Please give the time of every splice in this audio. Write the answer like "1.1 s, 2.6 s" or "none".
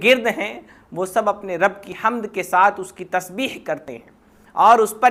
none